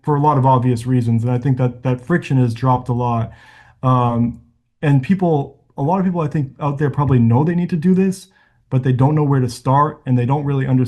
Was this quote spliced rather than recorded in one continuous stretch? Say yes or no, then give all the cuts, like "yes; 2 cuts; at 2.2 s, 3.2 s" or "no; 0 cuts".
no; 0 cuts